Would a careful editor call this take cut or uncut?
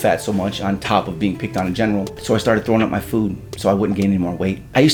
uncut